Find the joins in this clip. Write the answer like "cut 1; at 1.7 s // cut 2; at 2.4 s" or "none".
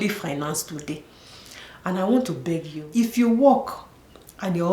cut 1; at 2.8 s